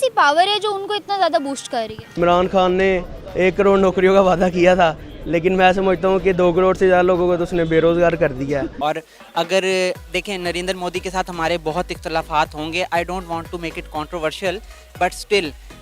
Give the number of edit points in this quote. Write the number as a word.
two